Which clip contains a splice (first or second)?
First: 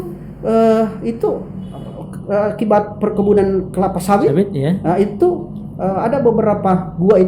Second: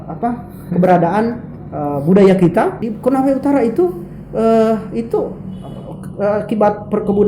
second